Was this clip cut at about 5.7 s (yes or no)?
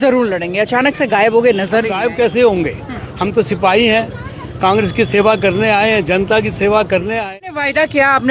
no